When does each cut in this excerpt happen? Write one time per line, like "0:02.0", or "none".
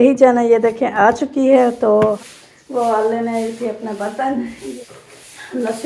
0:02.2
0:04.7